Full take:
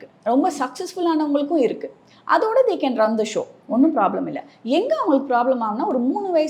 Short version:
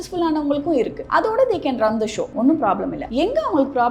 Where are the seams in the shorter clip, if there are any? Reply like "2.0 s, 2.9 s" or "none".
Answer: 1.0 s, 2.2 s, 3.0 s